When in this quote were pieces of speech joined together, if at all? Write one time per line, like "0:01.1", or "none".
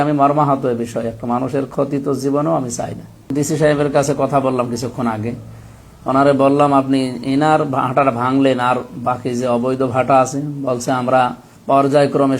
0:03.2
0:11.5